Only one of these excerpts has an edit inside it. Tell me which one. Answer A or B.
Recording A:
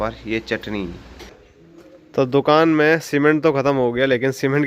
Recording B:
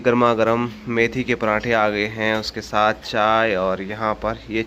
A